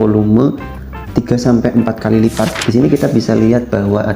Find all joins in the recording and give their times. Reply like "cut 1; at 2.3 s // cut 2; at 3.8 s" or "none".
cut 1; at 2.6 s